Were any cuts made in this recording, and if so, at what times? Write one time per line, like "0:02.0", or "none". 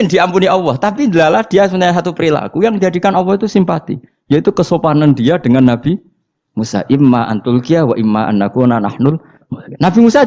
none